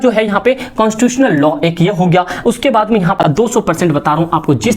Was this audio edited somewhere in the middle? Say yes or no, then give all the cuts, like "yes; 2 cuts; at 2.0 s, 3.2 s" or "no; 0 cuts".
yes; 1 cut; at 3.1 s